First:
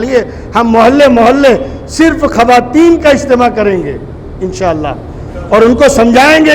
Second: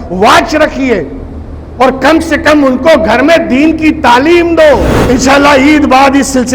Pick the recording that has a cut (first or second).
second